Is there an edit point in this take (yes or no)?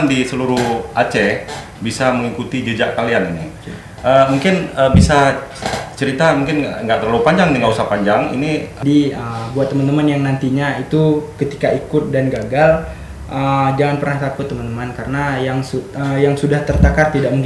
yes